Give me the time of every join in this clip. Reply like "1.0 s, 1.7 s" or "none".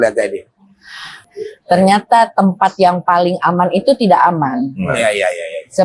1.1 s